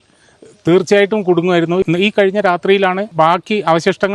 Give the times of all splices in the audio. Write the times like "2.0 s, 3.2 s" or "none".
1.8 s, 3.1 s

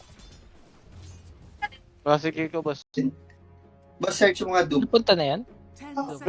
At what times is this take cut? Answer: 2.9 s

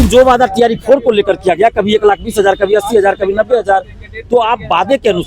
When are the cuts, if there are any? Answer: none

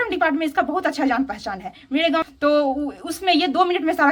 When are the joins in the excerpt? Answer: none

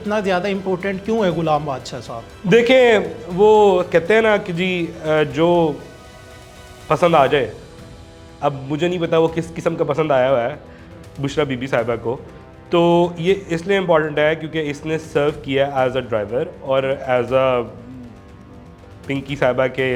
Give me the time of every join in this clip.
none

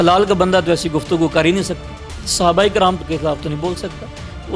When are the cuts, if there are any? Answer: none

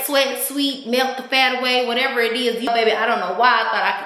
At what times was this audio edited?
2.7 s

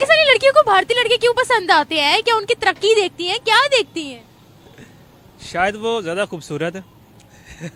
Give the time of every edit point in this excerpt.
none

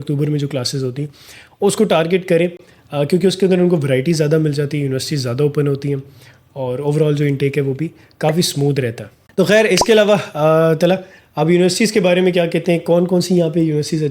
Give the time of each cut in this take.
none

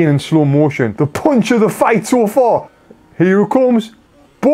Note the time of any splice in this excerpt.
none

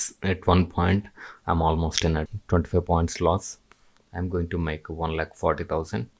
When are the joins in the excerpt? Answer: 2.3 s, 3.6 s

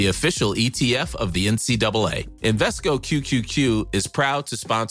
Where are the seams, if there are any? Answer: none

